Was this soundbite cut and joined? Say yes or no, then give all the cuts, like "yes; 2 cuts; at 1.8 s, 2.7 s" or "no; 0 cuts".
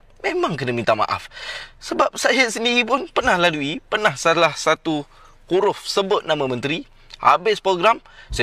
no; 0 cuts